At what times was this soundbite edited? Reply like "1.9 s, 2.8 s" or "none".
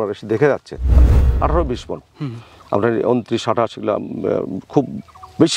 1.2 s